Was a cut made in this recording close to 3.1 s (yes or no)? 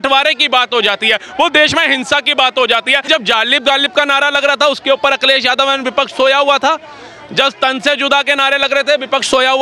yes